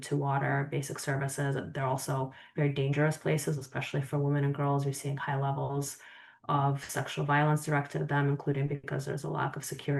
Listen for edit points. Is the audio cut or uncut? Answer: uncut